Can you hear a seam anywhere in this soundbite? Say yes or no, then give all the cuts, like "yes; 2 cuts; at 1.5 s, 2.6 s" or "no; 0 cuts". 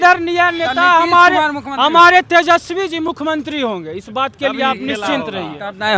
no; 0 cuts